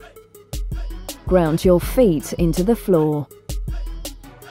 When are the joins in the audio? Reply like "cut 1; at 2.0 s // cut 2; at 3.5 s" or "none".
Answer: cut 1; at 1.2 s // cut 2; at 3.3 s